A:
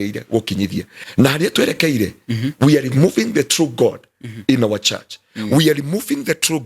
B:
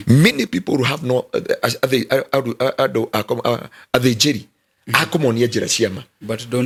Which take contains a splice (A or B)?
A